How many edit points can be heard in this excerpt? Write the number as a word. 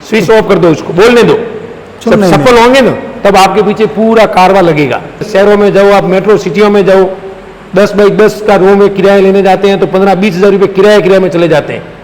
one